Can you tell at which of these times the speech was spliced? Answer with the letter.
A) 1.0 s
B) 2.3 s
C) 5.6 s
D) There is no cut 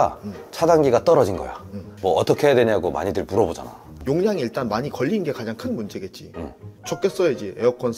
D